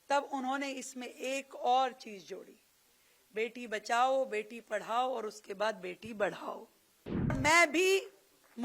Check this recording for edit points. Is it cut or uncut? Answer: cut